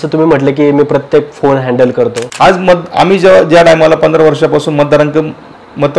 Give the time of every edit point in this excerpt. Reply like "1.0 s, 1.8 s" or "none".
2.2 s